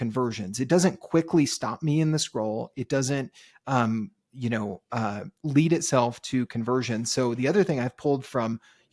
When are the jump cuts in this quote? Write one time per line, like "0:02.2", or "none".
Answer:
none